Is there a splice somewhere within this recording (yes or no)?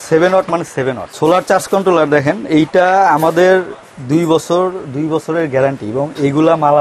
yes